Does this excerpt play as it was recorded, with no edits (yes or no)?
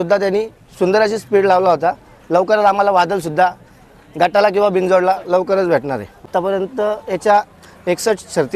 no